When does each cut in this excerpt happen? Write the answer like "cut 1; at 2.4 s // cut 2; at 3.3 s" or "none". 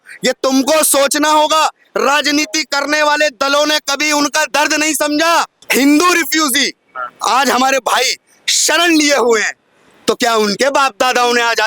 cut 1; at 5.6 s